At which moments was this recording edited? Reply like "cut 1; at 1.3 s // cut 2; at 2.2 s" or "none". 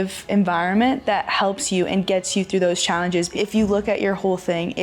cut 1; at 3.3 s